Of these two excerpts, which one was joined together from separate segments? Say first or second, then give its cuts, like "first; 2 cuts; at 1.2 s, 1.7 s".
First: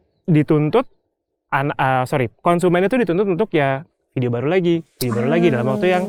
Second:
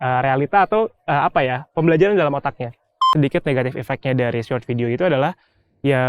second; 1 cut; at 3.0 s